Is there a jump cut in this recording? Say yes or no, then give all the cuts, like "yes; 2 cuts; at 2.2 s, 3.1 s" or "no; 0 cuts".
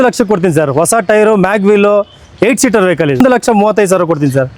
yes; 1 cut; at 3.2 s